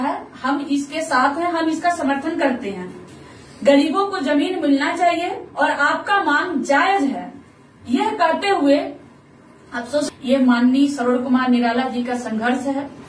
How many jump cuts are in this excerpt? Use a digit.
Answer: 1